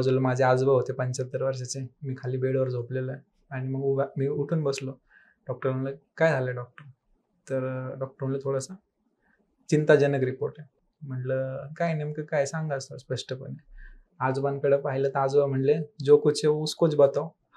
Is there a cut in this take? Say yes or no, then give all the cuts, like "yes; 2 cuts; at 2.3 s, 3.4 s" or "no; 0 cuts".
no; 0 cuts